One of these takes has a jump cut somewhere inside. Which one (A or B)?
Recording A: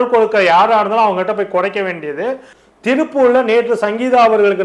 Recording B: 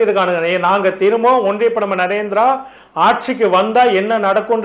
A